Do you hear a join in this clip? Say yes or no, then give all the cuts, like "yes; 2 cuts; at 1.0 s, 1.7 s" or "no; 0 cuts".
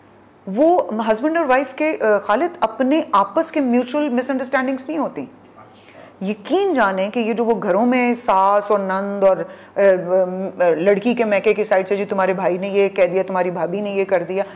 no; 0 cuts